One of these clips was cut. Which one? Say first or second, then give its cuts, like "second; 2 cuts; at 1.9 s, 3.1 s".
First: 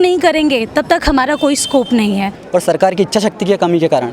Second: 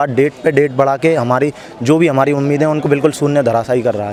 first; 1 cut; at 2.3 s